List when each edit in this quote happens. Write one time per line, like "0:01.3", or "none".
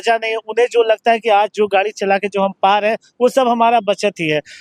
none